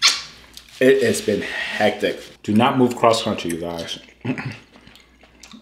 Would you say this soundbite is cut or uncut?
cut